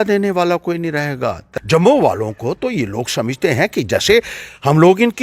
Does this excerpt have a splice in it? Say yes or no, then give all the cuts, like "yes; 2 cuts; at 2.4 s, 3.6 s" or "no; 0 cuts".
yes; 1 cut; at 1.4 s